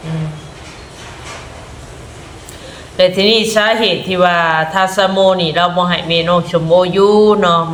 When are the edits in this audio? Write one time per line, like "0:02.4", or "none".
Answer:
none